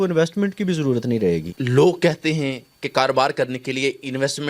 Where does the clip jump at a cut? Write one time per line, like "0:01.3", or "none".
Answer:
0:01.5